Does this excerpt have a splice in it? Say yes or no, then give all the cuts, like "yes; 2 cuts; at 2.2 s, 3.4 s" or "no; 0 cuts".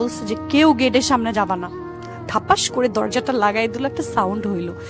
yes; 1 cut; at 1.7 s